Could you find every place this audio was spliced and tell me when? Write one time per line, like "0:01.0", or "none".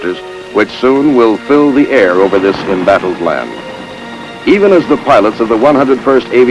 none